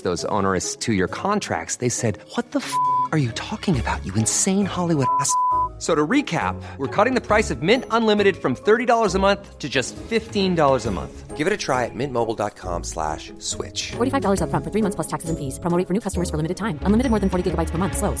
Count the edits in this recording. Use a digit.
0